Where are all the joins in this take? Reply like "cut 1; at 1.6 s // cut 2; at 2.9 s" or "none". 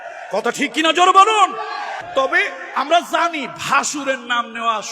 cut 1; at 1.9 s